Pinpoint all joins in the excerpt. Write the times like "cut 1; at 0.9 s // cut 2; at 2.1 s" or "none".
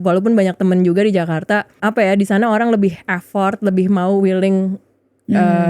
cut 1; at 1.7 s